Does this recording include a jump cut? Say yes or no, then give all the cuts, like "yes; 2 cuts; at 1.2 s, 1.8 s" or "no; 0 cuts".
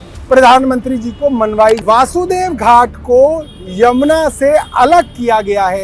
yes; 1 cut; at 1.8 s